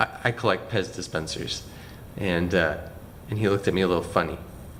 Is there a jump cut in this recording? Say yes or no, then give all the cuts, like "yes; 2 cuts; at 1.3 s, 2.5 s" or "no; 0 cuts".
no; 0 cuts